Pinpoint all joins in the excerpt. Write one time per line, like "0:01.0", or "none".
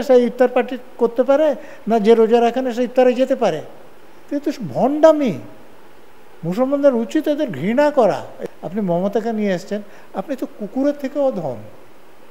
0:08.3